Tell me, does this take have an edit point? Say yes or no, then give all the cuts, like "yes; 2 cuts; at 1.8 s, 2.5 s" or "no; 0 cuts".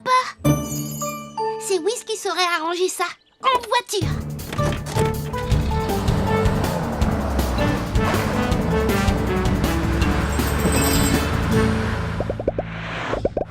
yes; 1 cut; at 10.1 s